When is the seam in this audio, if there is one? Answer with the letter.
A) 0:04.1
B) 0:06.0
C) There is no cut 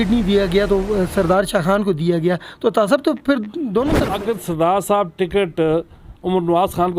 A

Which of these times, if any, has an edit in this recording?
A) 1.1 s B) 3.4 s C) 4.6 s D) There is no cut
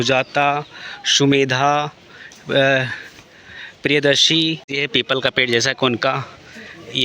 C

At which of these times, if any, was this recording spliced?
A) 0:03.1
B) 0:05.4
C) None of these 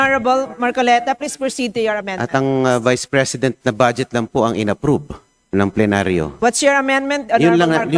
C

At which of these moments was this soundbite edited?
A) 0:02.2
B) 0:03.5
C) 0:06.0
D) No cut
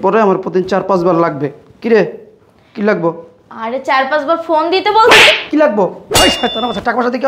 C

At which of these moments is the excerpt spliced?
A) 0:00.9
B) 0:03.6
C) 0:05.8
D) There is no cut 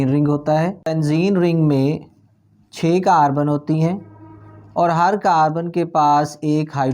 A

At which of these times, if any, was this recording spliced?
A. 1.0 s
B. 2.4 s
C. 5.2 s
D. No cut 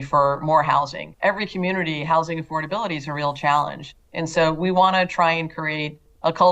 A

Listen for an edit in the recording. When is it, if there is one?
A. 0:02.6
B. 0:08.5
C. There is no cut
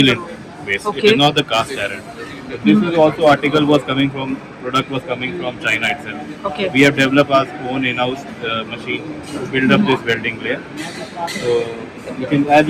C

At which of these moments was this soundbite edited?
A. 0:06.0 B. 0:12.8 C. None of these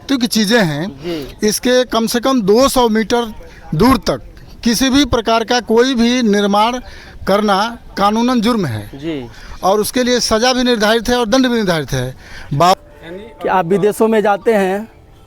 B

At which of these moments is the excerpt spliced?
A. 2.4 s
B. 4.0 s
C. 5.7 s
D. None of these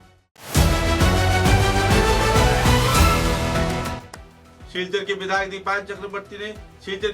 B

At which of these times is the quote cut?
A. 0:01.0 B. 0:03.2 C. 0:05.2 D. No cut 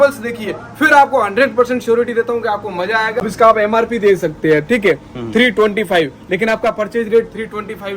B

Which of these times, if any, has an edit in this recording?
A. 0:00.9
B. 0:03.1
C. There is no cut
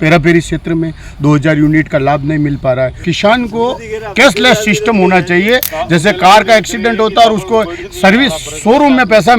B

